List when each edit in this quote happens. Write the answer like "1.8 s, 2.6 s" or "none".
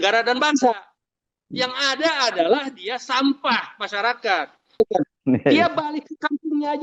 none